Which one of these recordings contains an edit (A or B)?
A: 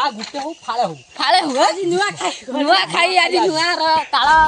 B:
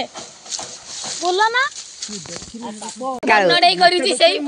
B